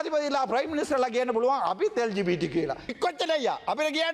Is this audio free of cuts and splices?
no; 1 cut; at 2.9 s

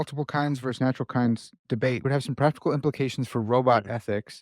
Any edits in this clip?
yes; 1 cut; at 2.0 s

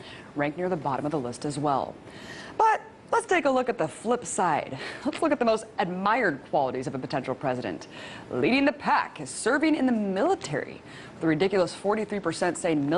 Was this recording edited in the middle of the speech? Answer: yes; 1 cut; at 6.7 s

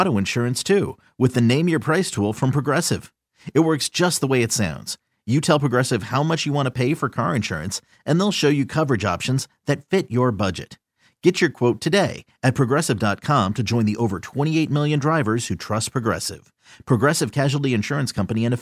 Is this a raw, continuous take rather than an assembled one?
yes; 0 cuts

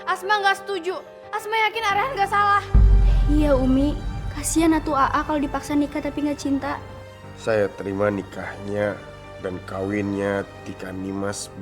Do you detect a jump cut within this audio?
yes; 1 cut; at 7.3 s

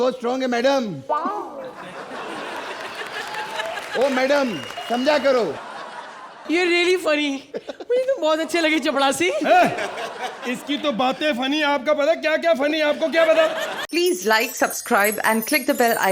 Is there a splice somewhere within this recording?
yes; 1 cut; at 13.8 s

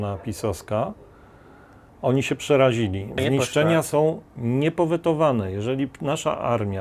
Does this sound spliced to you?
yes; 1 cut; at 3.2 s

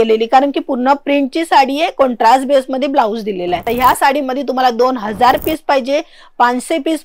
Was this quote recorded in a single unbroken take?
no; 1 cut; at 3.7 s

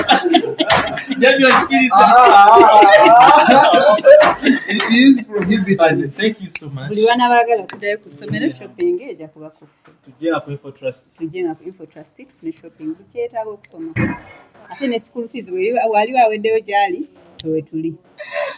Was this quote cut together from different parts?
no; 0 cuts

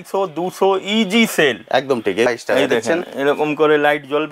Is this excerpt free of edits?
no; 1 cut; at 2.3 s

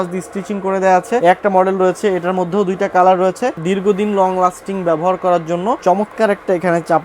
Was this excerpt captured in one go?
no; 3 cuts; at 1.2 s, 3.6 s, 5.8 s

